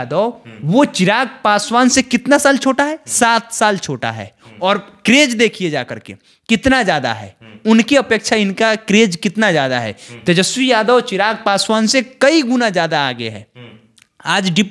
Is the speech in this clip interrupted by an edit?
no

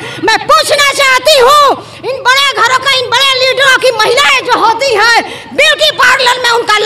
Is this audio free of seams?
yes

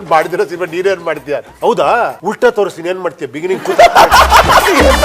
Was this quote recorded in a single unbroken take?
no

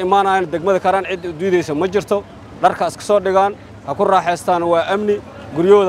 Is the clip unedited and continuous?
yes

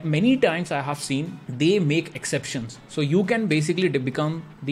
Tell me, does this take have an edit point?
no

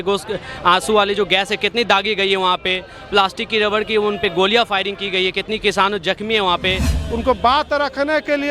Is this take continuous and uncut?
no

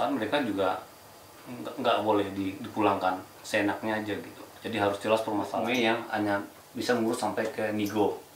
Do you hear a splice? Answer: yes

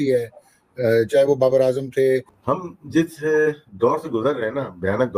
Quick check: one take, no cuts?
no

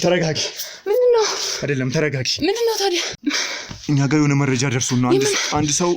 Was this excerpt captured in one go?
no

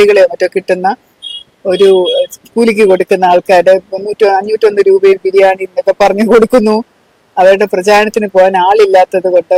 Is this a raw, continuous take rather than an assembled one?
yes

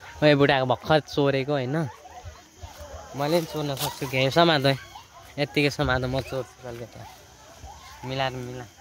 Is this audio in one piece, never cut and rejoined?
yes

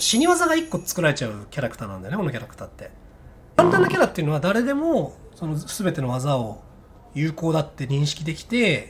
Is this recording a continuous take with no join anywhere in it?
no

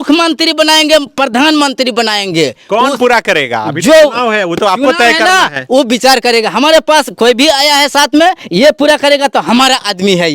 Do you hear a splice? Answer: no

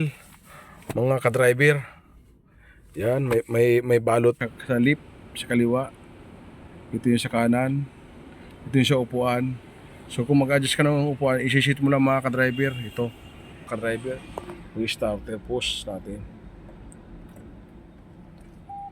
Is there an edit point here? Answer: yes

